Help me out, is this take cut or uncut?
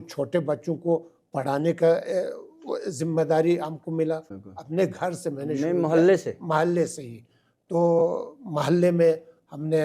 cut